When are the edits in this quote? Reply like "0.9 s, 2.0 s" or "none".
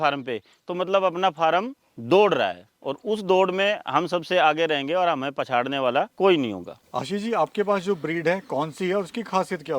none